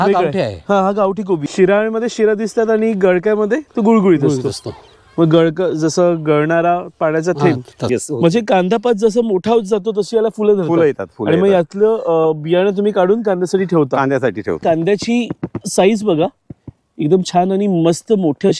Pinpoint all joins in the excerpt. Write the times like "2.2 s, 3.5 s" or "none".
1.5 s, 7.9 s, 14.6 s